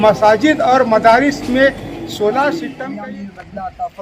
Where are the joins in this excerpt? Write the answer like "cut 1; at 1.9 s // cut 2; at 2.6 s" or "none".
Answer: cut 1; at 2.7 s